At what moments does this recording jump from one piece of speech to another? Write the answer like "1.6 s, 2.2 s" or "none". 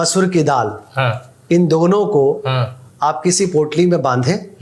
none